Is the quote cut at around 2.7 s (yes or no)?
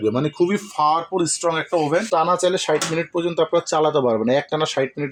no